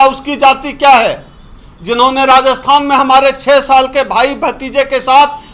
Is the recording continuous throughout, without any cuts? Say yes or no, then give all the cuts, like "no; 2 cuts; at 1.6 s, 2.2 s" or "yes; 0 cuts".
yes; 0 cuts